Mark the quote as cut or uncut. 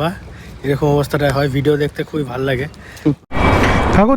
cut